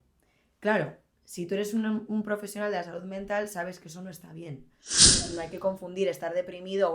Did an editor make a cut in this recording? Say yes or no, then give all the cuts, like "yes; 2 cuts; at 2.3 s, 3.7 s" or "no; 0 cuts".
yes; 1 cut; at 5.0 s